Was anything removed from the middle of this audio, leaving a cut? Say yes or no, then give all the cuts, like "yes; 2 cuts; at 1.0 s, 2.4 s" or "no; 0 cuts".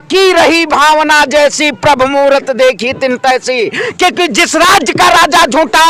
yes; 1 cut; at 3.8 s